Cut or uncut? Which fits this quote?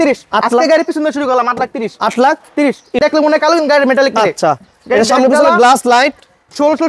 cut